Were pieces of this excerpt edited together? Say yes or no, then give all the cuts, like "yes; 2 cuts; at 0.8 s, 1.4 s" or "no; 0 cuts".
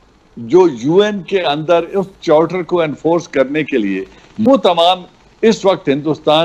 yes; 1 cut; at 4.4 s